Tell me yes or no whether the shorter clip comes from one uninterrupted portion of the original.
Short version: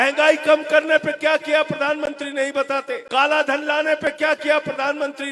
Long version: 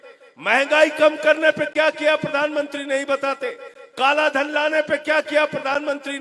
no